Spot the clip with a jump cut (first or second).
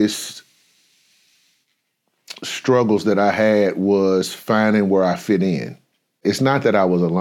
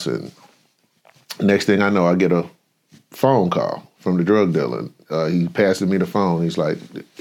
first